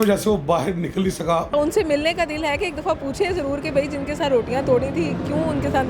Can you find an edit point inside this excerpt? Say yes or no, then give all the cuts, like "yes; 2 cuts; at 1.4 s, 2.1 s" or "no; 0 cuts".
yes; 1 cut; at 1.5 s